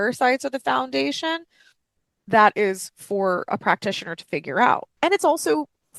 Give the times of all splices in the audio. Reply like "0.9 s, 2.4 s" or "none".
4.9 s